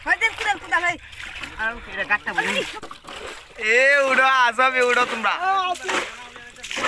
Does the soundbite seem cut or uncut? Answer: cut